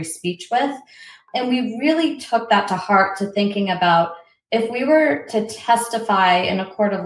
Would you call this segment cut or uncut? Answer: cut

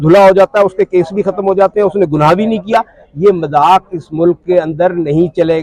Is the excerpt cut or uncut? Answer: uncut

